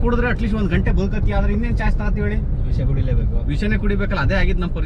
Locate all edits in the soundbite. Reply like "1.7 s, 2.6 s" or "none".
none